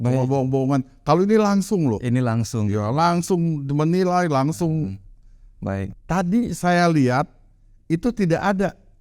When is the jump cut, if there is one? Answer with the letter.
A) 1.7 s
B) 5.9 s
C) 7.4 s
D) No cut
B